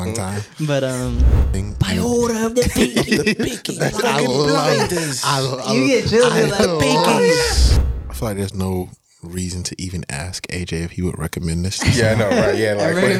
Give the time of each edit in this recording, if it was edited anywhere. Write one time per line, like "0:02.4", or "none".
0:01.4
0:07.7